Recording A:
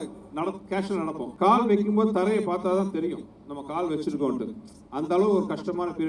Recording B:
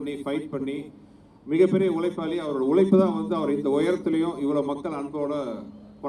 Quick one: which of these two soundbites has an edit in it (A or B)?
A